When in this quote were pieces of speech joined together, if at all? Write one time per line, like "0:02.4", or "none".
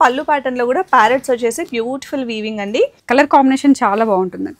0:03.0